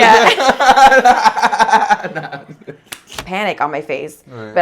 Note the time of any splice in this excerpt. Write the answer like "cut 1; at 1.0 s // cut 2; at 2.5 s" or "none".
cut 1; at 3.2 s